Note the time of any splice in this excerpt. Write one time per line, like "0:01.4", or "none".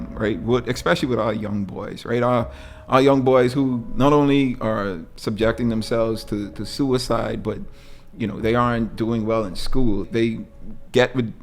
0:05.1
0:10.1